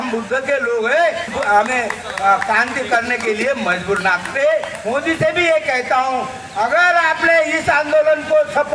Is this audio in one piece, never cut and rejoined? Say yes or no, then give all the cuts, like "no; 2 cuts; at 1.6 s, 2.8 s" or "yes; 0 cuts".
no; 2 cuts; at 1.3 s, 4.8 s